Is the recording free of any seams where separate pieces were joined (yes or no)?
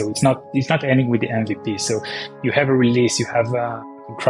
yes